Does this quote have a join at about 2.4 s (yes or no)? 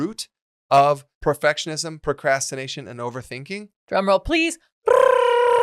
no